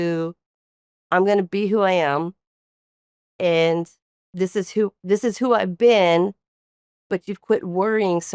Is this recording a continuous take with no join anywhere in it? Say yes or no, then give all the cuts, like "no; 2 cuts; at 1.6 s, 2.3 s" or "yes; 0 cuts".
yes; 0 cuts